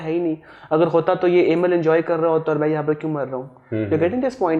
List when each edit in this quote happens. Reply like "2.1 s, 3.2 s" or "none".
none